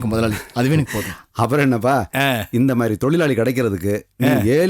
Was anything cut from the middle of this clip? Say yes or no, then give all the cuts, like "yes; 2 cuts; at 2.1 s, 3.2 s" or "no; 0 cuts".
no; 0 cuts